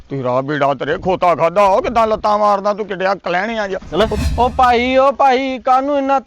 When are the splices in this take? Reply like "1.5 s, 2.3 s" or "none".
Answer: 4.2 s